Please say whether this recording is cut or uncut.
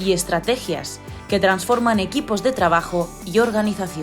uncut